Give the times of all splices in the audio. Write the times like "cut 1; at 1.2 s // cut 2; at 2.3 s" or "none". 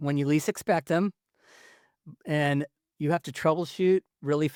none

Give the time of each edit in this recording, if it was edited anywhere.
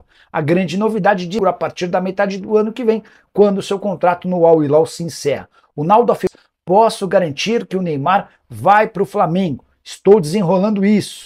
cut 1; at 1.4 s // cut 2; at 6.3 s

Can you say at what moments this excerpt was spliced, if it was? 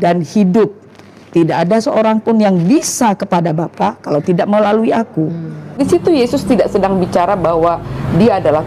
cut 1; at 5.8 s

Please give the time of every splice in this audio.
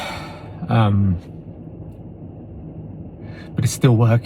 none

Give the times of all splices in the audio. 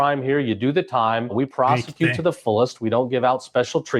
cut 1; at 1.3 s

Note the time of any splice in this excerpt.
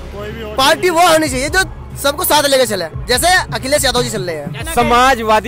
cut 1; at 4.5 s

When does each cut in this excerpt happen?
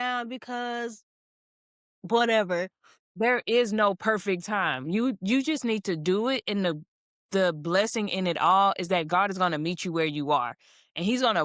cut 1; at 3.1 s

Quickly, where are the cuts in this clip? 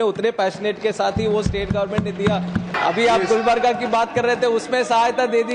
cut 1; at 2.7 s

